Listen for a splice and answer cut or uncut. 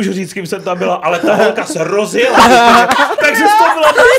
cut